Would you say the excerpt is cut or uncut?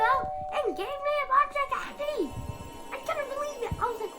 cut